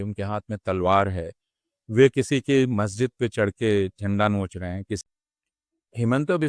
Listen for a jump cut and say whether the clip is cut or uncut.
cut